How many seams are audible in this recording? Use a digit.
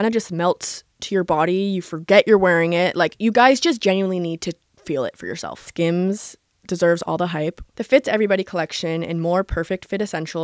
1